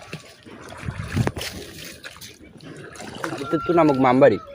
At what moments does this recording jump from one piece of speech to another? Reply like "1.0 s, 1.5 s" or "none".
3.5 s